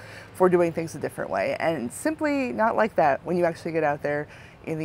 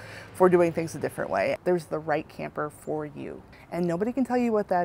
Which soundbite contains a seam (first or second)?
second